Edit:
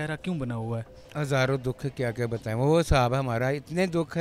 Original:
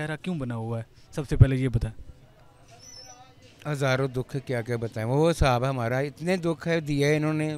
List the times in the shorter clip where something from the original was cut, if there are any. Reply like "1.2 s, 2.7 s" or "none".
1.0 s